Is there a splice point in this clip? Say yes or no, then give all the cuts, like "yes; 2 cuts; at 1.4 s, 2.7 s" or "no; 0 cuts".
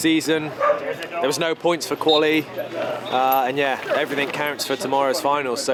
no; 0 cuts